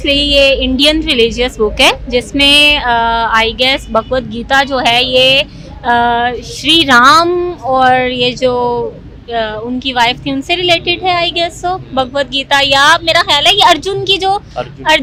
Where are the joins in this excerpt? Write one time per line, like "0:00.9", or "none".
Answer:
none